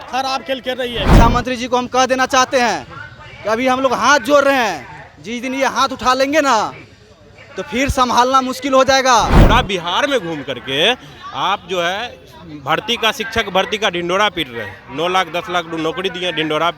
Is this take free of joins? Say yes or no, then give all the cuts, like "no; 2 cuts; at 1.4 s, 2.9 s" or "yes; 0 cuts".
no; 2 cuts; at 1.1 s, 9.4 s